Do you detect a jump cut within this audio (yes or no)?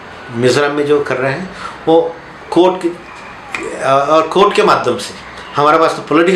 no